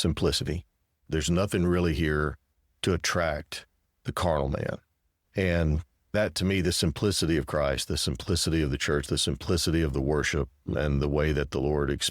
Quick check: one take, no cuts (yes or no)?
no